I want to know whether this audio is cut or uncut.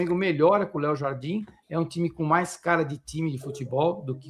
uncut